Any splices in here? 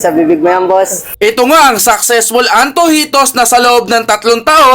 yes; 1 cut; at 1.0 s

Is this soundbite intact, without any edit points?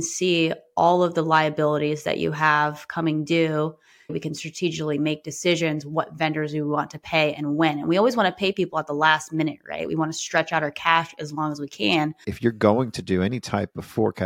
no; 2 cuts; at 4.2 s, 12.3 s

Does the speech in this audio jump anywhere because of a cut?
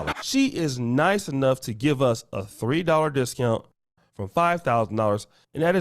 no; 0 cuts

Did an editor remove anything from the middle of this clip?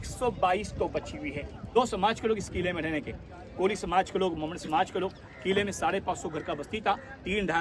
yes; 1 cut; at 1.6 s

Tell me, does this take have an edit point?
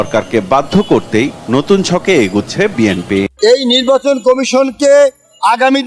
yes; 1 cut; at 3.1 s

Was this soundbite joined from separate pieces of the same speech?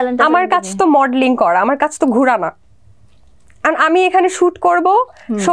no; 0 cuts

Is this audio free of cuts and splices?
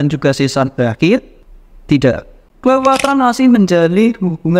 yes; 0 cuts

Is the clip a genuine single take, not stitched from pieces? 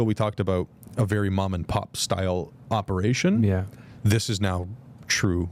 yes; 0 cuts

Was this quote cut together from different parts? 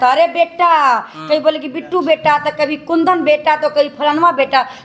no; 0 cuts

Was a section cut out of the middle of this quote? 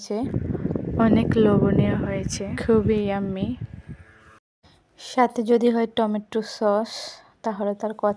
no; 0 cuts

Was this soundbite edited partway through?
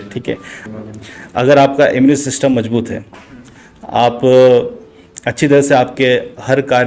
no; 0 cuts

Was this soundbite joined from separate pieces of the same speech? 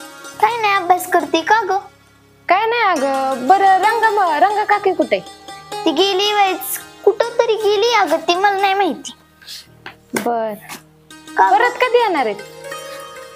no; 0 cuts

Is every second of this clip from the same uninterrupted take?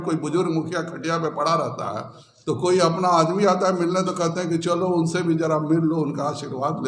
yes; 0 cuts

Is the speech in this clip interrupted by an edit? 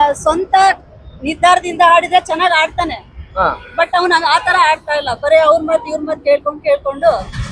no; 0 cuts

